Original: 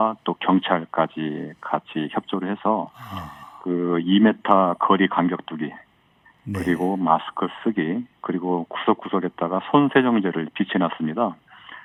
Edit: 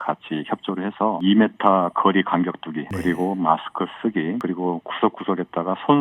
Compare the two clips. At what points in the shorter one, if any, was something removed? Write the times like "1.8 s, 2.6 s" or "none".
1.2 s, 2.9 s, 4.4 s